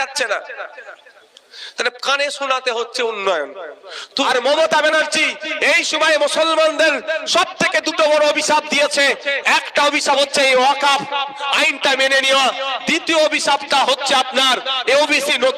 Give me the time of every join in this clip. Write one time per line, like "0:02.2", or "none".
0:04.2